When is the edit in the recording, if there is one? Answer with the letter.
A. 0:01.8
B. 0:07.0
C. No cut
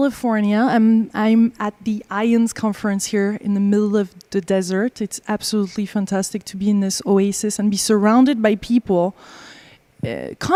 C